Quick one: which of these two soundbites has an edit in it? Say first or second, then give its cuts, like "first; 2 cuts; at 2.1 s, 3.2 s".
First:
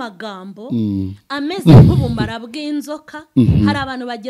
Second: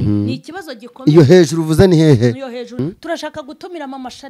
second; 1 cut; at 2.8 s